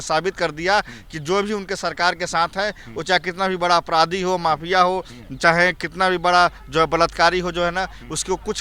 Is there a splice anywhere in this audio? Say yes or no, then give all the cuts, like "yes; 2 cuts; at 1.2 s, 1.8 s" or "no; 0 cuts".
no; 0 cuts